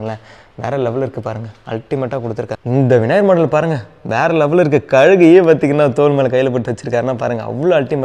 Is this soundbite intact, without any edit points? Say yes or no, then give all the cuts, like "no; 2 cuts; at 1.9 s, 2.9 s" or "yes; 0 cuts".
no; 1 cut; at 2.6 s